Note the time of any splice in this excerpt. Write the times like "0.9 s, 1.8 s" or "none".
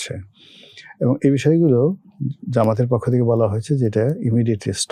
none